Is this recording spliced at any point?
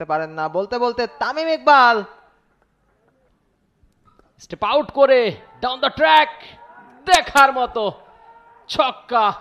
yes; 1 cut; at 3.3 s

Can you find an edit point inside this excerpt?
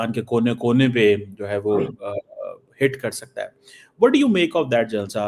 no; 0 cuts

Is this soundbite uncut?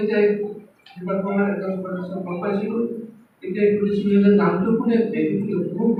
yes; 0 cuts

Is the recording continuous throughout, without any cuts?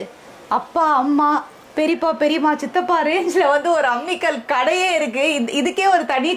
yes; 0 cuts

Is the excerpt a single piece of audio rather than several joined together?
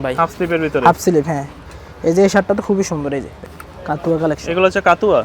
no; 2 cuts; at 1.8 s, 3.4 s

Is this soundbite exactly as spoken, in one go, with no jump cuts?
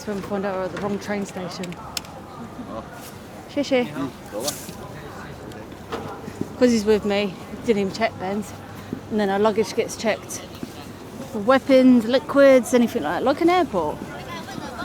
yes; 0 cuts

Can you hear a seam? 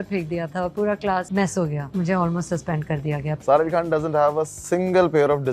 yes; 2 cuts; at 1.7 s, 3.3 s

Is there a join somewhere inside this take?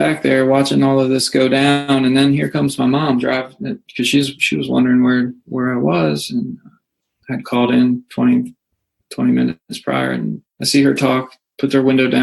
yes; 1 cut; at 10.5 s

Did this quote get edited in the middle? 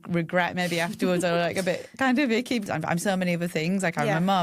yes; 1 cut; at 2.7 s

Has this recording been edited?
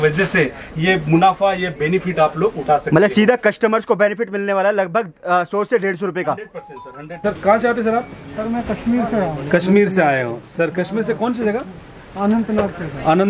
yes; 1 cut; at 7.2 s

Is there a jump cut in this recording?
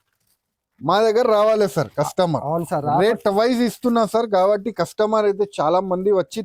no; 0 cuts

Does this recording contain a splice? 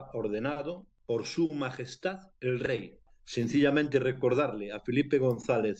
yes; 2 cuts; at 0.9 s, 3.2 s

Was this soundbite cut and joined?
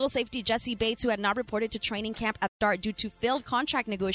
yes; 1 cut; at 2.5 s

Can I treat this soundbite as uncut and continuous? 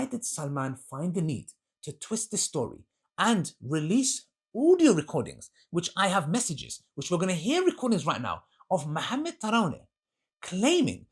yes; 0 cuts

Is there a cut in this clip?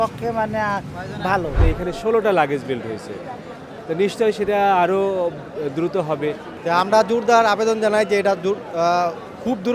yes; 2 cuts; at 1.6 s, 6.5 s

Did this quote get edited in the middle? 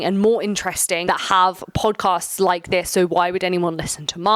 no; 0 cuts

